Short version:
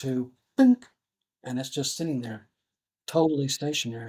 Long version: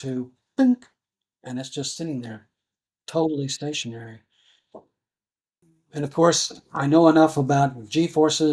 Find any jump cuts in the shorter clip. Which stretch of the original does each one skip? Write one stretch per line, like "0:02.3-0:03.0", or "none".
none